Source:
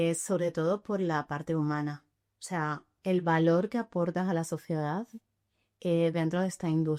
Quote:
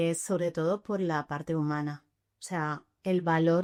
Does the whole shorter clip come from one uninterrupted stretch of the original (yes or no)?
yes